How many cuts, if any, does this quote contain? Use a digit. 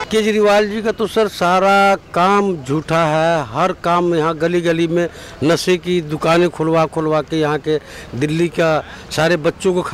0